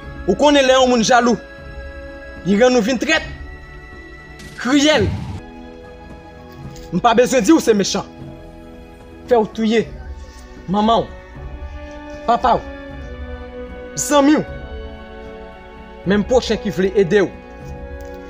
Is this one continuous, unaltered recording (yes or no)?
no